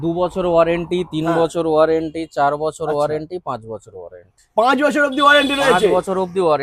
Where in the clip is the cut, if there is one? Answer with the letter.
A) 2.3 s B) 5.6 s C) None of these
C